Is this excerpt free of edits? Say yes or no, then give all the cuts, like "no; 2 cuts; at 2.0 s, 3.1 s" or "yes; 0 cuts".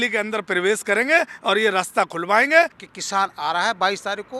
no; 1 cut; at 2.8 s